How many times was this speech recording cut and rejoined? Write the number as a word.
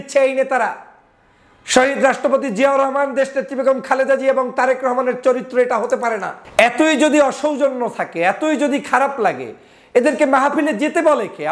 one